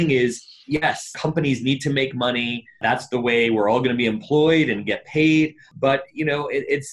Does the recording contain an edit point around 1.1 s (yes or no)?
yes